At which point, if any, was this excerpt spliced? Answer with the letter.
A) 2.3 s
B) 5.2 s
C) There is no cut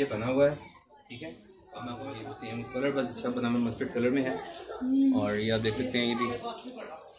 A